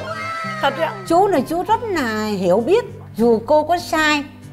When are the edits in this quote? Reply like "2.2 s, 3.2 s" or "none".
1.0 s, 3.0 s